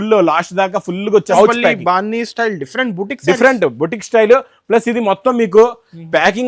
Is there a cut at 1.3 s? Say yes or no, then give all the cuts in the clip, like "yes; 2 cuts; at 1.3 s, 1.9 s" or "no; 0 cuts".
yes; 1 cut; at 1.3 s